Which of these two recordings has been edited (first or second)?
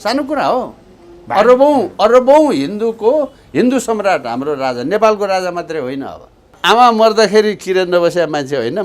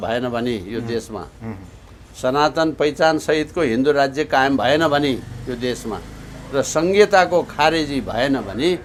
first